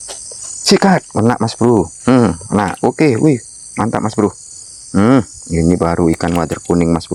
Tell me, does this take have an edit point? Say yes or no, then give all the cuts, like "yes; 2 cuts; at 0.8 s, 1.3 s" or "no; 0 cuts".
no; 0 cuts